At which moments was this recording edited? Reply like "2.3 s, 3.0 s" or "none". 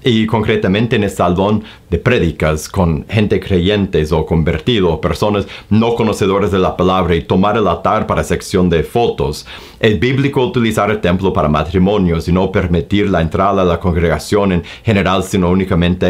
none